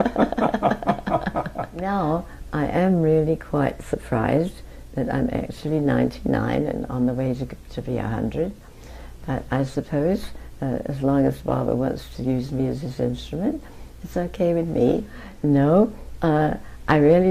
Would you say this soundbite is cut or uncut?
cut